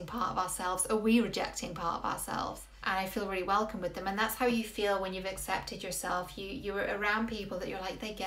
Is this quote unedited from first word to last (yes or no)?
no